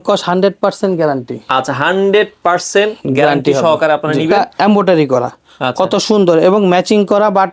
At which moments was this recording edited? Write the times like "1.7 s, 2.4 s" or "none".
4.5 s